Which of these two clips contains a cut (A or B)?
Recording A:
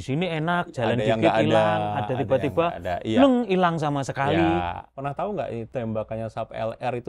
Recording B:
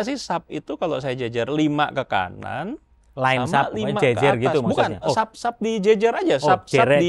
A